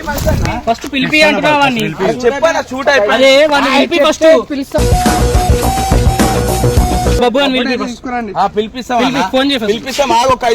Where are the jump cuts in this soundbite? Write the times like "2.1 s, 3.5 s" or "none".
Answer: 7.2 s